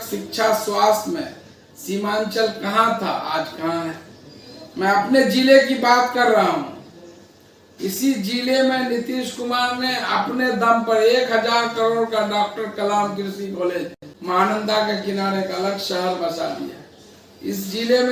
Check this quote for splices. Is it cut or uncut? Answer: uncut